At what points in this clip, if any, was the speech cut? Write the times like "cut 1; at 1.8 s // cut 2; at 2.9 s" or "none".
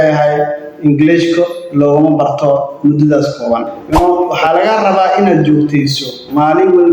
cut 1; at 3.8 s